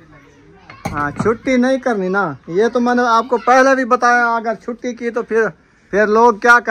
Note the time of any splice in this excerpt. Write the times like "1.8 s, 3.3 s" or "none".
5.6 s